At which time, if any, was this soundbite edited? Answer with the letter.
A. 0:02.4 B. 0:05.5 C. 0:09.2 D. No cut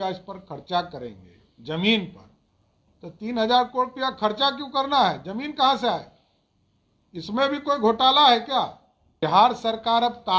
C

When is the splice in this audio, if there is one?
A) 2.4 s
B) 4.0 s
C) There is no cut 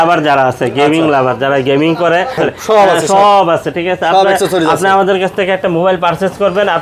A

